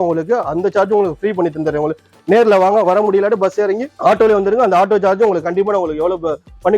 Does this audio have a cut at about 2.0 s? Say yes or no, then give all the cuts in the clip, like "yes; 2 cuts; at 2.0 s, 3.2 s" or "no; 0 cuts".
no; 0 cuts